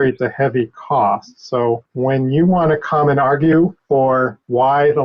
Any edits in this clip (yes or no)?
yes